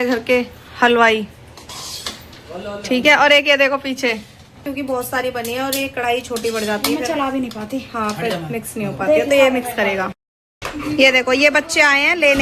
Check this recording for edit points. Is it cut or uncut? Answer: cut